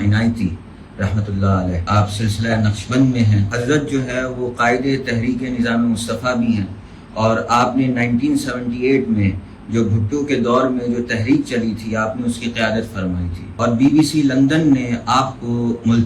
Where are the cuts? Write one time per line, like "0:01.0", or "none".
0:01.8
0:03.5
0:13.4